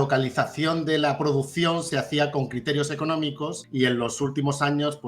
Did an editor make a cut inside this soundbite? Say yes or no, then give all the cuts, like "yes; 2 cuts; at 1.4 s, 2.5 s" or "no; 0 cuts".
yes; 1 cut; at 3.6 s